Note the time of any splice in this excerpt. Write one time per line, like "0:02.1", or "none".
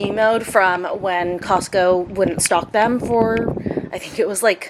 none